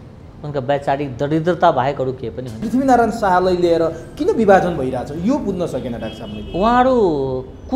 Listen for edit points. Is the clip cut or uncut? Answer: cut